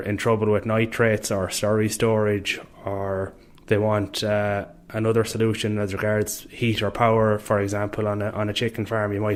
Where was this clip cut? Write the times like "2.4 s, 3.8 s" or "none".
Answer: none